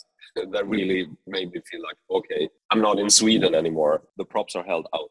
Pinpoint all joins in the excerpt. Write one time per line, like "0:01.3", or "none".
0:02.6
0:04.2